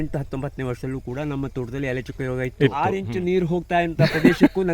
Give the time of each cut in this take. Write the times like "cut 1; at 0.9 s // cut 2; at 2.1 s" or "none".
cut 1; at 2.9 s

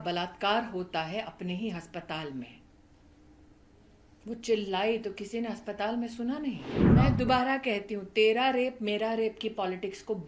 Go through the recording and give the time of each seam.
cut 1; at 6.7 s

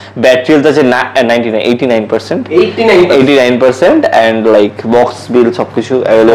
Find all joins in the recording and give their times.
none

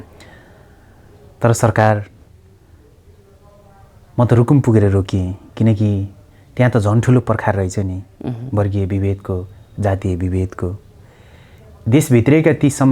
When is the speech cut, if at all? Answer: none

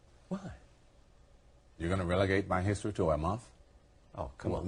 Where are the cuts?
none

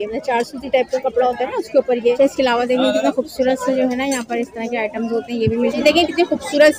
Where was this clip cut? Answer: cut 1; at 2.2 s // cut 2; at 5.7 s

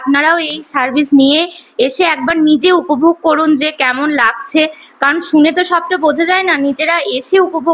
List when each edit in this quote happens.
none

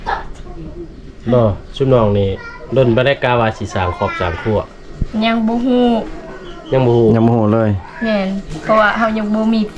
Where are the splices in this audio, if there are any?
none

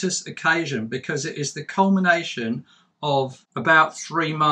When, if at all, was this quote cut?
cut 1; at 3.4 s

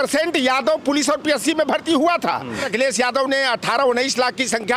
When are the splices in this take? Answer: cut 1; at 2.7 s

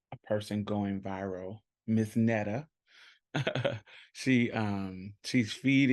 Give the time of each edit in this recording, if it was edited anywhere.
none

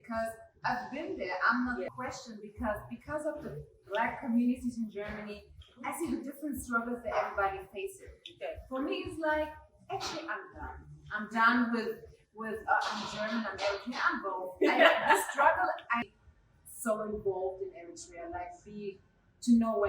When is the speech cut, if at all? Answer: cut 1; at 1.9 s // cut 2; at 16.0 s

